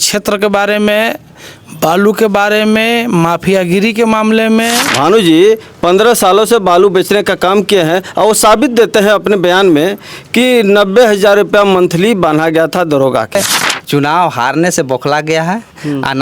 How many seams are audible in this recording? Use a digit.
2